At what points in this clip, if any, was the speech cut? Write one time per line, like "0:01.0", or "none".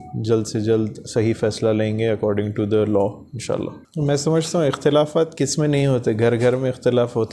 none